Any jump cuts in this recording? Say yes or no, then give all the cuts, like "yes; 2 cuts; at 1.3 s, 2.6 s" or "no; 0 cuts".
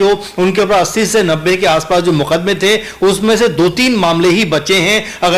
no; 0 cuts